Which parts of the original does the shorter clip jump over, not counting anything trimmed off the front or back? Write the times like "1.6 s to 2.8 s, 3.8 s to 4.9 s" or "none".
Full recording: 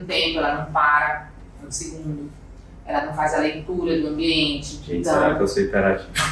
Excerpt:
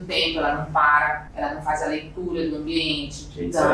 1.3 s to 2.8 s